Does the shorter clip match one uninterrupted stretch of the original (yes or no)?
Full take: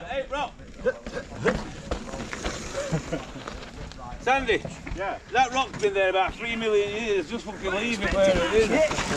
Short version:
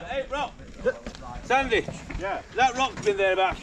no